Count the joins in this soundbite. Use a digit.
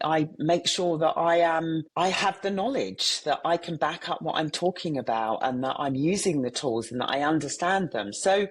1